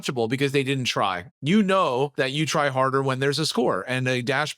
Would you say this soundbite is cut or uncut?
cut